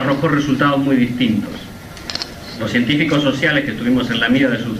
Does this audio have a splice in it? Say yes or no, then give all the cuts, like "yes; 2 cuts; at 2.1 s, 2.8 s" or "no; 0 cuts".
yes; 1 cut; at 2.6 s